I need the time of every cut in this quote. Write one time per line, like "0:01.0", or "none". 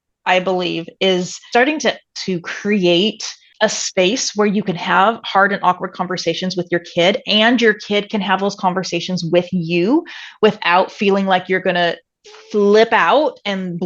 0:01.4